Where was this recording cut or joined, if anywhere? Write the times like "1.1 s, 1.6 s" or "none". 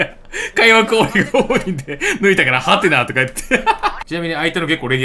4.0 s

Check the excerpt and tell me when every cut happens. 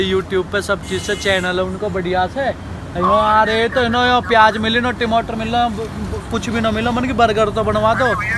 none

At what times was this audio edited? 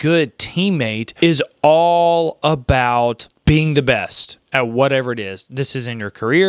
1.0 s, 3.3 s

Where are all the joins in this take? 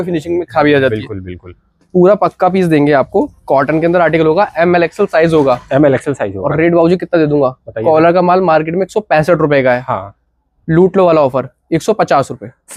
none

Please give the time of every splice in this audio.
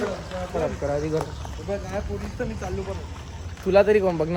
none

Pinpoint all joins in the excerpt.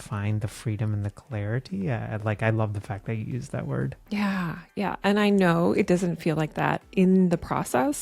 4.0 s

